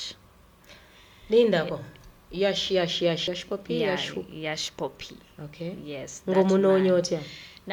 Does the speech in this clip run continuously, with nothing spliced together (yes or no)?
no